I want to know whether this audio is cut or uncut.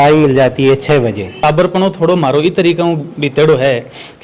cut